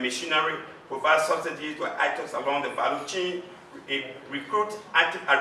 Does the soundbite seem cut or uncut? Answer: uncut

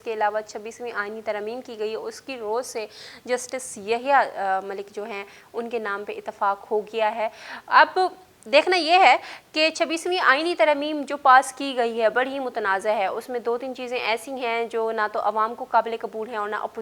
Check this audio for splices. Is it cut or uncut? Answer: uncut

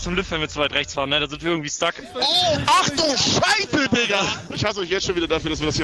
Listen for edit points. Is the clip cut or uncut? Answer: cut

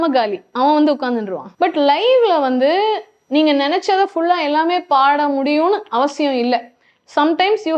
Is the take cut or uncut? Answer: cut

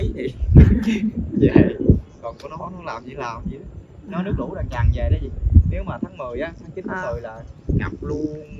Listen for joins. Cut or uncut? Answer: uncut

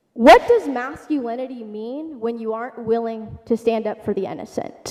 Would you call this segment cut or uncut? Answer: uncut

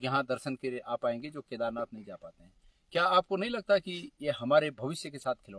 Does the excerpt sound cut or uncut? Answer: uncut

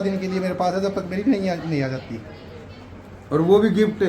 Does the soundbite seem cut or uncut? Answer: uncut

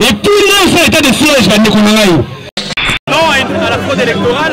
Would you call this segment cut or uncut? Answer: cut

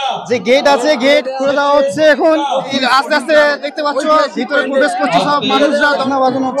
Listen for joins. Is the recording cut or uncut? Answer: uncut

